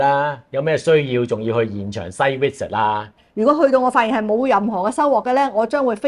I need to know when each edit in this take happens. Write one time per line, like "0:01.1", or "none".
0:03.2